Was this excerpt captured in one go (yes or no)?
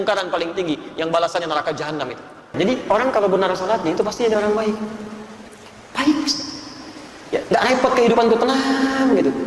no